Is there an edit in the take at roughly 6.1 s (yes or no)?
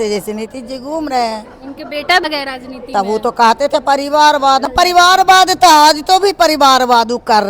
no